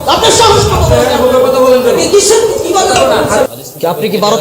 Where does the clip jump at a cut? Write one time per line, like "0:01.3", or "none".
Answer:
0:03.5